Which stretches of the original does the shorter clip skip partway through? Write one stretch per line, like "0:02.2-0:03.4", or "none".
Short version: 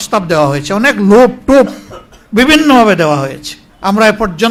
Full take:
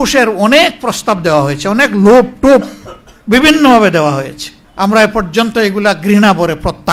none